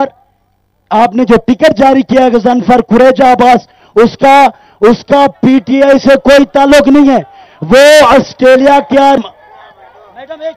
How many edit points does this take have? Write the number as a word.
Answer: one